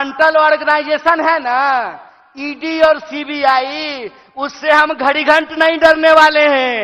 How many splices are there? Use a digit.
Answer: 0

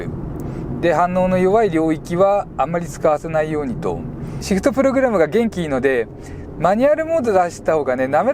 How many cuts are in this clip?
1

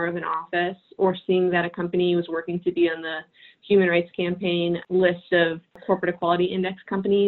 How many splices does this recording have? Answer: 2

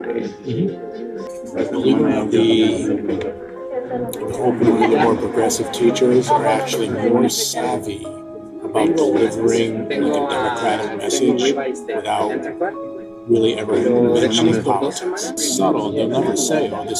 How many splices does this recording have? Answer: 0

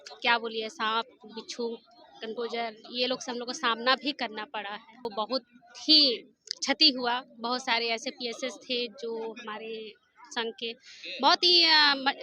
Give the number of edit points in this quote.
1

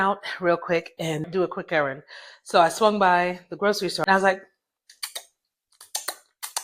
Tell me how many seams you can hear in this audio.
2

